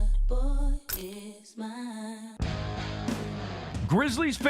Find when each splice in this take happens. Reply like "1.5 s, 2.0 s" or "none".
2.3 s